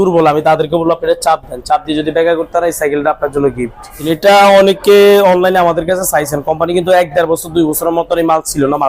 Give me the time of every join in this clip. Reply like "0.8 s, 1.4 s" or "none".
4.0 s